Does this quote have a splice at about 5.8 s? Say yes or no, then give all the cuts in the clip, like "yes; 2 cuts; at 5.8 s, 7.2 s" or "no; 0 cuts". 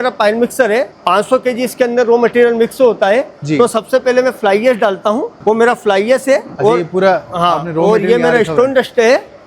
no; 1 cut; at 0.9 s